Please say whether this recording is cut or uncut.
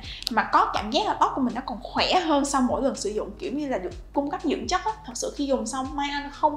cut